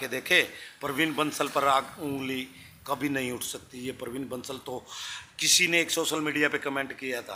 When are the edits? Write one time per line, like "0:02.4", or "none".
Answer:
none